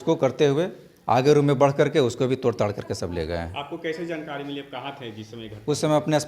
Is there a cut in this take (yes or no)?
no